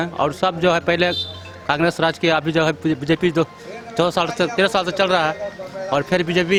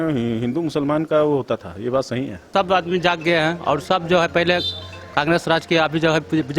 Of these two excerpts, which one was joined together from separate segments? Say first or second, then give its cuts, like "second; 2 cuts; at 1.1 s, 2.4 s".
second; 1 cut; at 2.5 s